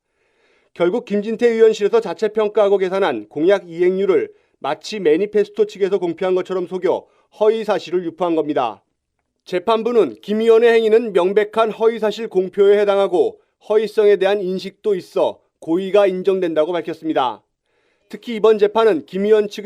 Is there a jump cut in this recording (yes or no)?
yes